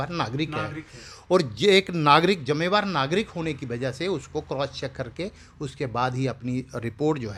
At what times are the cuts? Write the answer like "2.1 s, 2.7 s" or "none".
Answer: none